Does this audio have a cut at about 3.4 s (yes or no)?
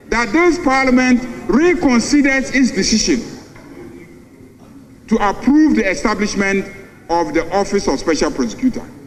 no